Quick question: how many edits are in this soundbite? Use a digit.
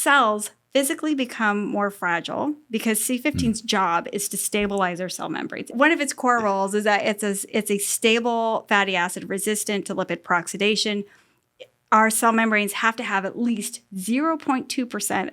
1